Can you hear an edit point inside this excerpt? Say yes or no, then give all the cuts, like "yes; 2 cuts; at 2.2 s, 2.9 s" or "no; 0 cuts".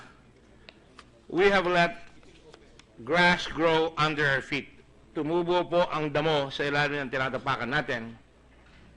yes; 1 cut; at 5.9 s